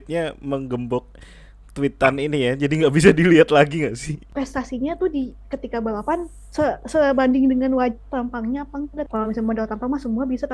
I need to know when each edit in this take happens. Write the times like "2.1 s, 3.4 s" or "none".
4.2 s, 6.4 s, 9.1 s